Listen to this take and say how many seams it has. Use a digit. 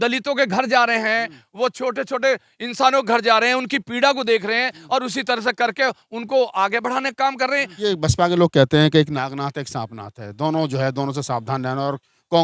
1